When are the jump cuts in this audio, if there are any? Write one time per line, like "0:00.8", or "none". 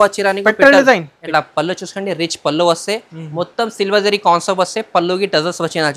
0:01.1